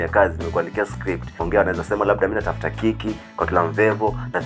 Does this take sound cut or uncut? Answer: cut